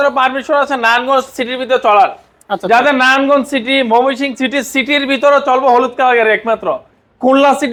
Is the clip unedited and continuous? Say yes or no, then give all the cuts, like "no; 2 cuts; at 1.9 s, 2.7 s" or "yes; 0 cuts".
yes; 0 cuts